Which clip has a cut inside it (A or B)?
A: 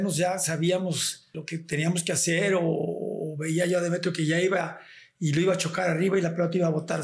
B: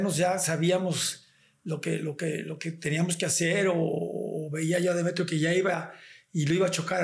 A